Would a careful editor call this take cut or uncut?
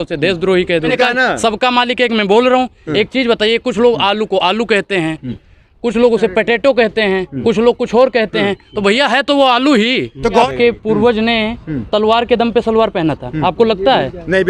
cut